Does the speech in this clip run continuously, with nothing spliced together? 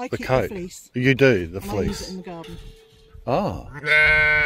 yes; 0 cuts

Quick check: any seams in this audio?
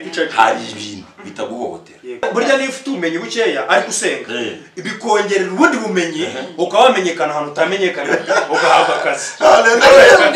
yes; 1 cut; at 2.2 s

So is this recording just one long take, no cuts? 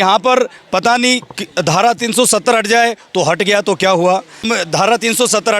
no; 1 cut; at 4.5 s

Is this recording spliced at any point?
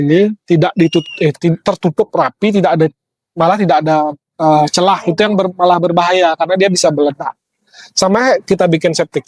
no; 0 cuts

